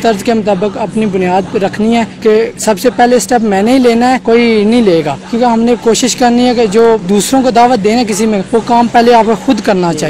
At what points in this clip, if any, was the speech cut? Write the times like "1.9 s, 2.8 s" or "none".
none